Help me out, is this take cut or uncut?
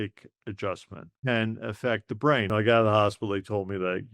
cut